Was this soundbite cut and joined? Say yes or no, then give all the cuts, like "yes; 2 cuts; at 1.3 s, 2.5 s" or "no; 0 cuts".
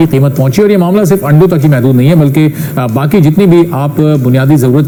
no; 0 cuts